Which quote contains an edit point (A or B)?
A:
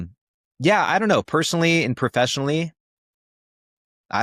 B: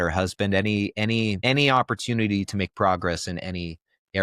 B